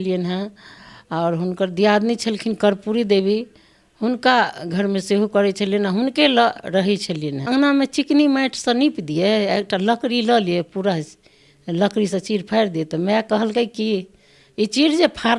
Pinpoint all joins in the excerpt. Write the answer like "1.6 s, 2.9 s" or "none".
7.5 s

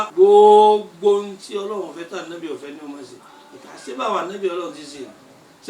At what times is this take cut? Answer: none

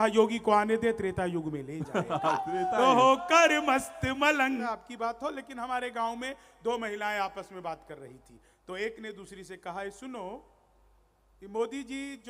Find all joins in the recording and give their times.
4.6 s

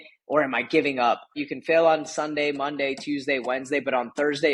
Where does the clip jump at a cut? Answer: 1.4 s

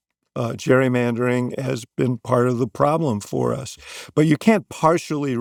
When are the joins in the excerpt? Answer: none

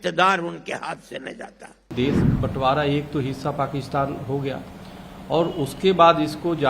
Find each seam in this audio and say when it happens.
1.9 s

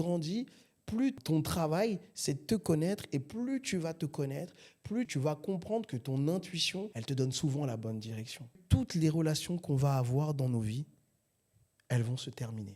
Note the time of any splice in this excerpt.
5.1 s, 8.6 s

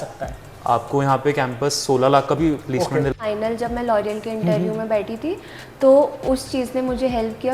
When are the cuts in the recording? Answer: 3.1 s

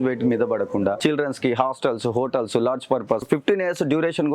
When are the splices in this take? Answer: 1.0 s, 3.2 s

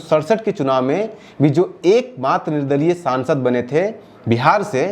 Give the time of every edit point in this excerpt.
none

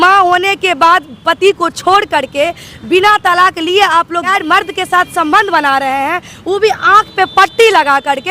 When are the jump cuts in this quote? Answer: 4.3 s

